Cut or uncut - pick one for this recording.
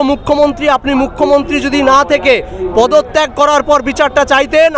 uncut